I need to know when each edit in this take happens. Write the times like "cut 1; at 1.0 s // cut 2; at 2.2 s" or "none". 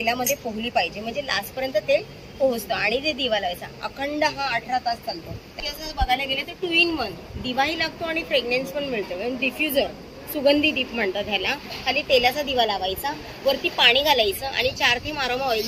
cut 1; at 5.5 s